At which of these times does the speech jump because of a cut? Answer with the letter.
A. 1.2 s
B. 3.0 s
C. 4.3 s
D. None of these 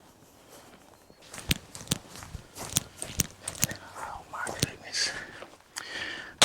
A